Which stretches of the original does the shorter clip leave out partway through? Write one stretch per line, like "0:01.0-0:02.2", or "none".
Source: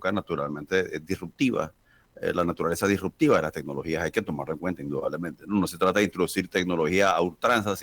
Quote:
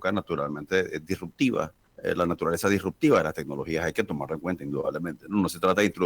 0:01.8-0:02.0